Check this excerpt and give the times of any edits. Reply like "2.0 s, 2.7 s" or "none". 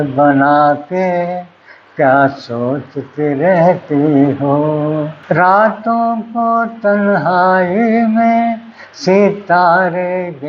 5.1 s